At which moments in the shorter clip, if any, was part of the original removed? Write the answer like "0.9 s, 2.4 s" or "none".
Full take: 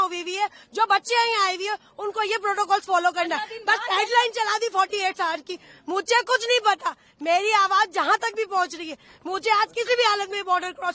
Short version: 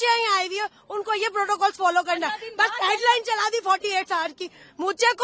none